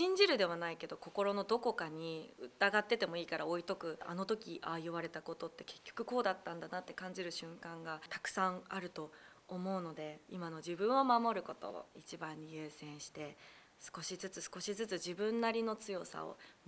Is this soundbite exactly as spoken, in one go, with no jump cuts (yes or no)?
no